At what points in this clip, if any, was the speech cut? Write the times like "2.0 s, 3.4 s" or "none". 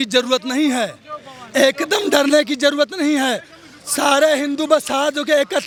none